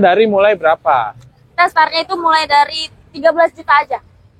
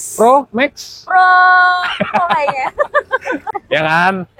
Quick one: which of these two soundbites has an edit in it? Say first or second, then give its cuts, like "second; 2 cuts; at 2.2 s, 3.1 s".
second; 1 cut; at 3.4 s